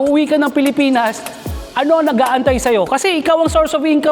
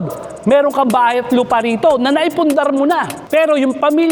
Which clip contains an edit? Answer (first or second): second